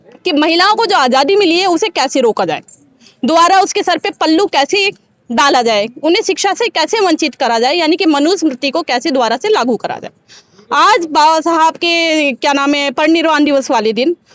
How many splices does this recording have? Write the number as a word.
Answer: zero